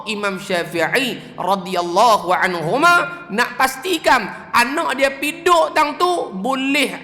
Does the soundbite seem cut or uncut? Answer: uncut